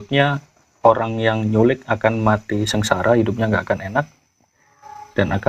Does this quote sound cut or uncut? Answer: uncut